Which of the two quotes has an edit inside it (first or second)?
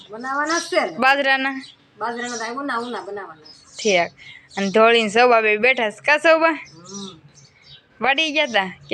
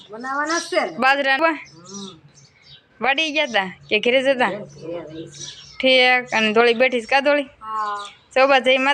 second